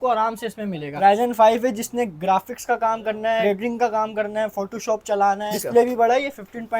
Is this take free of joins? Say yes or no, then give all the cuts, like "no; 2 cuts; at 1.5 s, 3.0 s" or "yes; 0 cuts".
no; 3 cuts; at 0.9 s, 3.4 s, 5.5 s